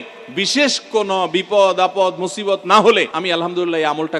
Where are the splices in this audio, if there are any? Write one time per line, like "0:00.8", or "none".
0:03.1